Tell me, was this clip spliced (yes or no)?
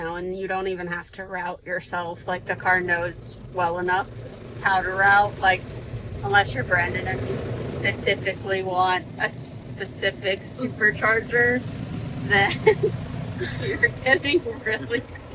no